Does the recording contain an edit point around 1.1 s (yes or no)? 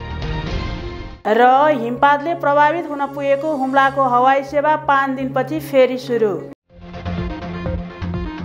yes